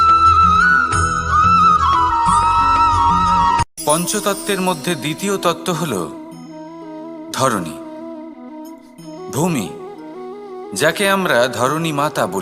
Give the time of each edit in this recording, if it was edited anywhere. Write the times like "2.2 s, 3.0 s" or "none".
1.8 s